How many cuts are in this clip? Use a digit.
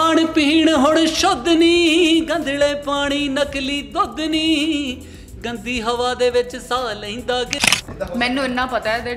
1